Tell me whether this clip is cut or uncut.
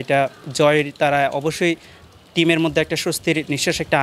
uncut